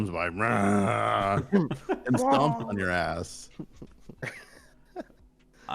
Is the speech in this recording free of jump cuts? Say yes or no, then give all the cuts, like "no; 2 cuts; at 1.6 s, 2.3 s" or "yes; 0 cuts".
no; 1 cut; at 4.2 s